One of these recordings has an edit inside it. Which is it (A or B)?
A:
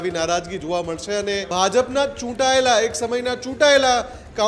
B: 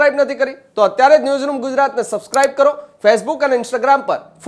A